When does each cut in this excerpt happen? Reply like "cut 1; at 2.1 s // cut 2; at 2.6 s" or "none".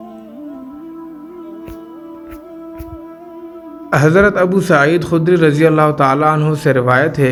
none